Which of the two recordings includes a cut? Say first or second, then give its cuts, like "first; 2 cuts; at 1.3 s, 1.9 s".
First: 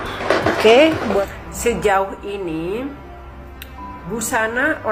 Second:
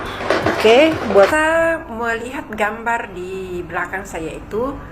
second; 1 cut; at 1.3 s